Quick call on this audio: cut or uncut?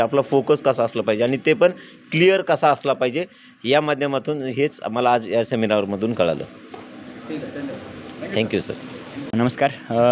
uncut